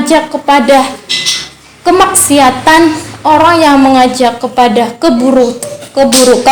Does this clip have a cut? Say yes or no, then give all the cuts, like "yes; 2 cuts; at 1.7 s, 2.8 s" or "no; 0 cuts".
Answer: no; 0 cuts